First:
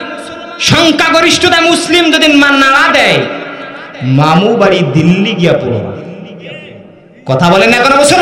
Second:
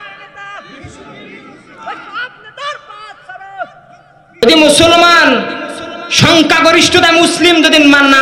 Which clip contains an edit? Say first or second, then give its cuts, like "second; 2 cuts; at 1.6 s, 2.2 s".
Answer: second; 1 cut; at 4.4 s